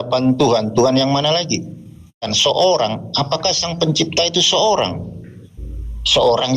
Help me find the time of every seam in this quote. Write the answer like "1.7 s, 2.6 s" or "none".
2.3 s